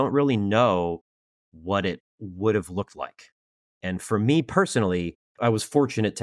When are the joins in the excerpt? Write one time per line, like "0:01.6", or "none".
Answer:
0:05.2